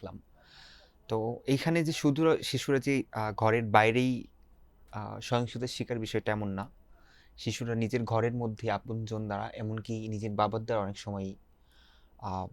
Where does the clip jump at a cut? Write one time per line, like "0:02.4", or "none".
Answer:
none